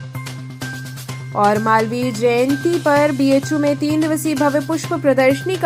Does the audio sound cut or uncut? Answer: cut